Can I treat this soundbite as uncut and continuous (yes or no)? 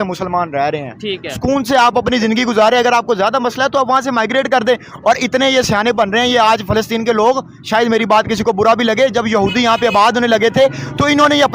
yes